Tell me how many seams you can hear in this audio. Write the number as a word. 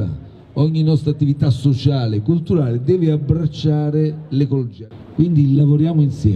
one